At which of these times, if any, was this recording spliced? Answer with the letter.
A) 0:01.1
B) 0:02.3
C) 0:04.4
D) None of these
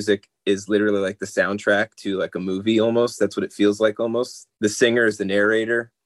C